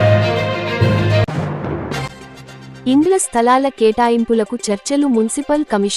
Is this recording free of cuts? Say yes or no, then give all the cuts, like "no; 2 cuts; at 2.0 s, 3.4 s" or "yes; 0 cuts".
yes; 0 cuts